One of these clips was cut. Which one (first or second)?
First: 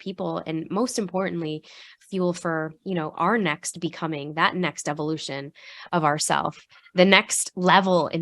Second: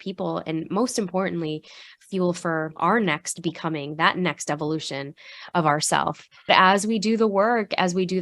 second